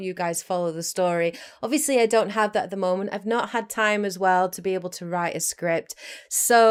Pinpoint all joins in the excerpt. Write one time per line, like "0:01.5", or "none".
none